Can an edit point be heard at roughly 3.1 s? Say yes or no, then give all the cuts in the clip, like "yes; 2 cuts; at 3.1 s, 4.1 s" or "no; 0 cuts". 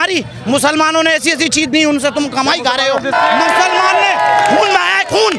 yes; 1 cut; at 3.1 s